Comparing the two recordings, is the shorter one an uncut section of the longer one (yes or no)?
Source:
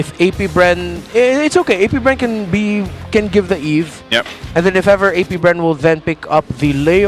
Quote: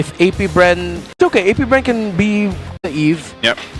no